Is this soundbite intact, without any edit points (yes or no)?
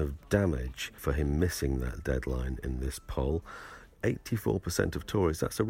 no